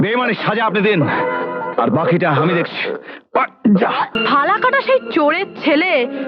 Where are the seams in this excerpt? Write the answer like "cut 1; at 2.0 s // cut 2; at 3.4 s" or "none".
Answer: cut 1; at 4.2 s